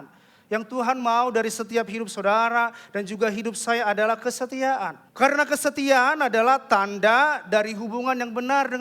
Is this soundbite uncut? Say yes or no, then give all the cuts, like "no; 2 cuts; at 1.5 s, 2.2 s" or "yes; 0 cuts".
no; 1 cut; at 5.0 s